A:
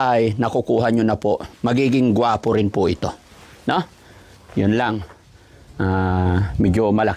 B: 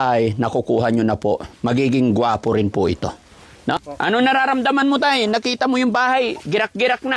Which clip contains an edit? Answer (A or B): B